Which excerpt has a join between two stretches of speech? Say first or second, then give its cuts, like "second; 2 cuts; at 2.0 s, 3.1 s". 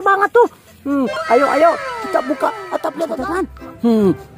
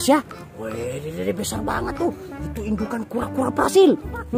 first; 1 cut; at 3.2 s